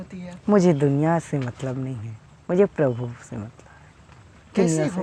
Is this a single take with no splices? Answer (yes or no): yes